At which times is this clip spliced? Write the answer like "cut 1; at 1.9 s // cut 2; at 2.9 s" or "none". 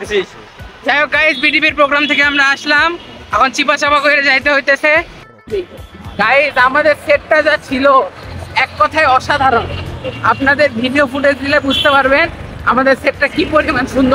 cut 1; at 5.3 s